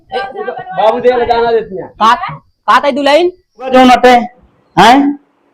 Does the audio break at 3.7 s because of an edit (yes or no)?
yes